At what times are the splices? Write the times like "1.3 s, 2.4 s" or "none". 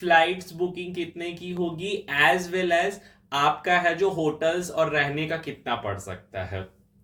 none

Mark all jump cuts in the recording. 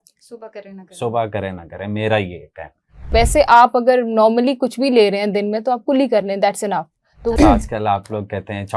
3.1 s, 7.3 s

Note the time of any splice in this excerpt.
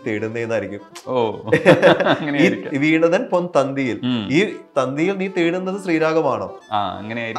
none

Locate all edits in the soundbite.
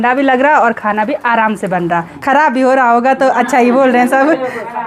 2.1 s

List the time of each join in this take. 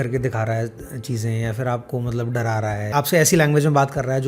2.9 s

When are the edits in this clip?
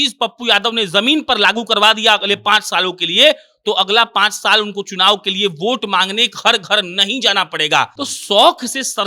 8.0 s

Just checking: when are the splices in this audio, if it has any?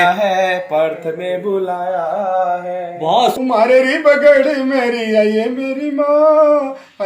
3.4 s

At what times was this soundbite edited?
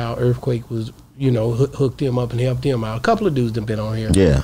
none

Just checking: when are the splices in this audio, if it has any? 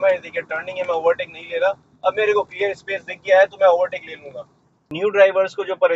4.8 s

